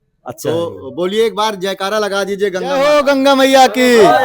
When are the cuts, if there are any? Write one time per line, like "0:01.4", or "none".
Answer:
0:02.7

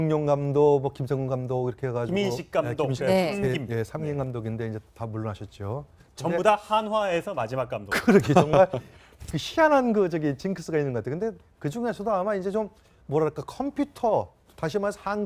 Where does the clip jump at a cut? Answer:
none

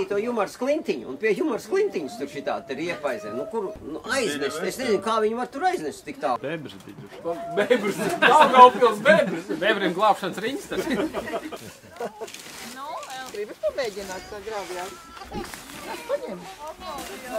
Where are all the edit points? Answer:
0:03.8
0:06.4
0:11.6

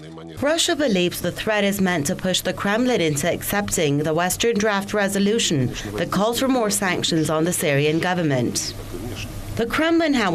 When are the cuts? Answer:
none

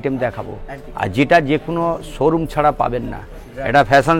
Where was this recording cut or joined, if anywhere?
none

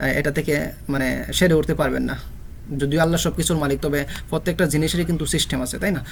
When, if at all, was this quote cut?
none

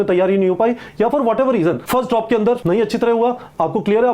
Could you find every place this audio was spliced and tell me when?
0:01.8
0:02.6

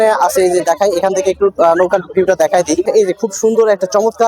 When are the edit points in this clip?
0:02.8

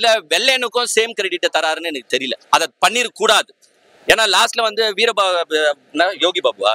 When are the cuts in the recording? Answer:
none

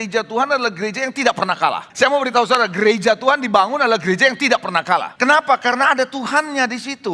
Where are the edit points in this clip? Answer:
0:01.8
0:05.1

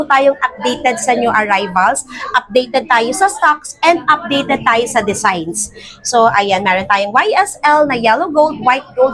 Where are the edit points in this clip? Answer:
none

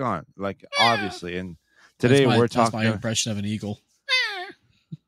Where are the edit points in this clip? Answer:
0:02.7

